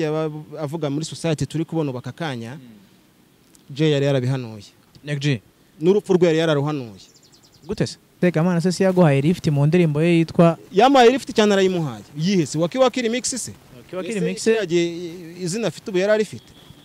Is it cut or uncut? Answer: cut